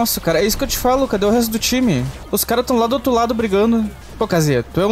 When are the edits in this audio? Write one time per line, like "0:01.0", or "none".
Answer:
0:02.1
0:04.0